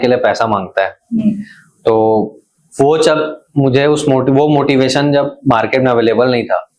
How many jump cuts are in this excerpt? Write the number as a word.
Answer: zero